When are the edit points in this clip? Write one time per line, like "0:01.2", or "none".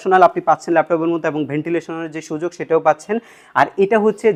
none